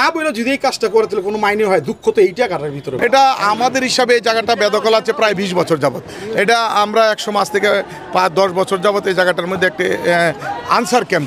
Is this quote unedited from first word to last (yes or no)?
yes